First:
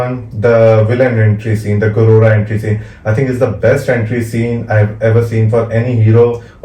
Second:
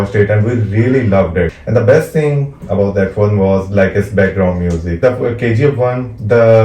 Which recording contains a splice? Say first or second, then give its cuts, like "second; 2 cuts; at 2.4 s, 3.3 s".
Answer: second; 2 cuts; at 1.6 s, 5.0 s